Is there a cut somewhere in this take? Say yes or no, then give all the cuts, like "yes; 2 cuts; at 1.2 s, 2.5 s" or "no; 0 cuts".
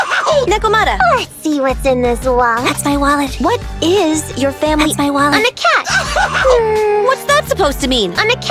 no; 0 cuts